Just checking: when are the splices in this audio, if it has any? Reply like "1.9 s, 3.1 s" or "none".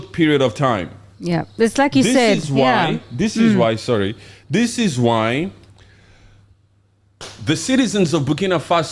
none